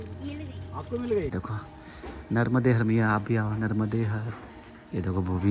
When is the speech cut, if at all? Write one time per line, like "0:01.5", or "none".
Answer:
0:01.3

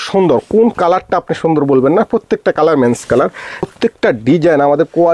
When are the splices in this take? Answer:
0:03.6

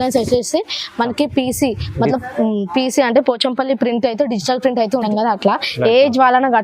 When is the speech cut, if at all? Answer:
0:05.0

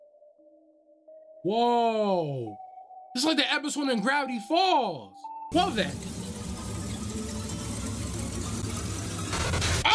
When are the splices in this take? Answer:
0:05.4

